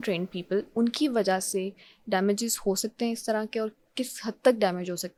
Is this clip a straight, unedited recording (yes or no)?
yes